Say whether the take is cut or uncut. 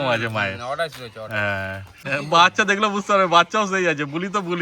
cut